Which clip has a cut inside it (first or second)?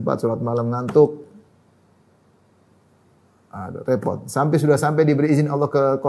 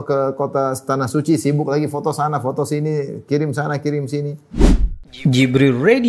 second